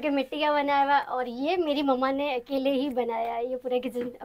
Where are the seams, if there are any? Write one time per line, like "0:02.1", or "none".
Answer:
none